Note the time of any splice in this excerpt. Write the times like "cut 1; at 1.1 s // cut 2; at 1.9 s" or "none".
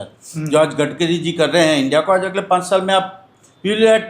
none